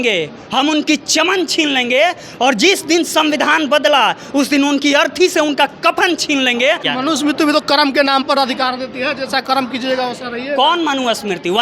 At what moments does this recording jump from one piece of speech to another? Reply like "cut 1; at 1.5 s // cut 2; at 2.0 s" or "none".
cut 1; at 6.9 s